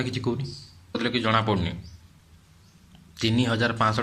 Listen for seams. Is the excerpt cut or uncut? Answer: cut